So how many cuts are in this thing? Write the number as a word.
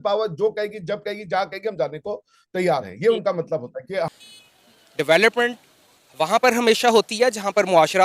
one